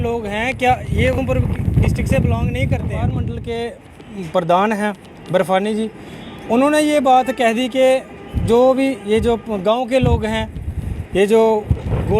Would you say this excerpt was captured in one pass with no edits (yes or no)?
no